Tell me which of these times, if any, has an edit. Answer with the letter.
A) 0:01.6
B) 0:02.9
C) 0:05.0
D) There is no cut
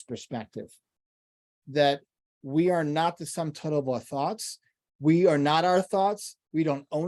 A